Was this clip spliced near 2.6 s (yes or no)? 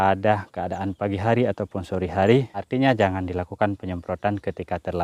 yes